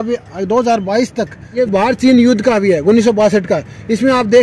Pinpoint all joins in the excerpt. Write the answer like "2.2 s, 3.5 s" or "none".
1.5 s